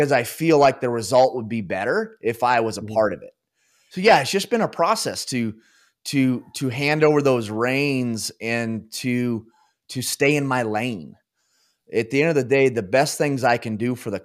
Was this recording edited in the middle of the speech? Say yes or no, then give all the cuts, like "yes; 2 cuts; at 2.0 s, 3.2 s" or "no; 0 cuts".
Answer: yes; 1 cut; at 4.0 s